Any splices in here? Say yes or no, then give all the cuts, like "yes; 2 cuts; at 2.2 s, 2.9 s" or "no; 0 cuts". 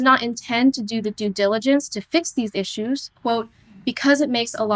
no; 0 cuts